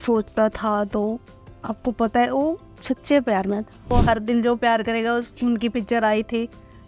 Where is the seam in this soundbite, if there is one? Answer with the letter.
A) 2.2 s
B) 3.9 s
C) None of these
B